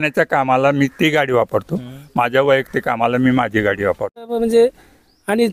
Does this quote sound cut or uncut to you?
cut